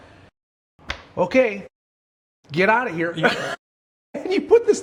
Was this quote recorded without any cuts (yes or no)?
yes